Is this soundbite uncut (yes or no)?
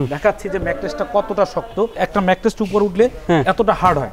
no